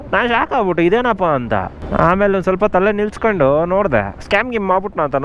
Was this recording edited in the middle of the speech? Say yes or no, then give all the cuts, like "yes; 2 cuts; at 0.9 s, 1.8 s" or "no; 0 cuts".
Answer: yes; 1 cut; at 1.8 s